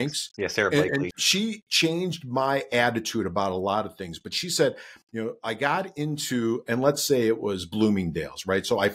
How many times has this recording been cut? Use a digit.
1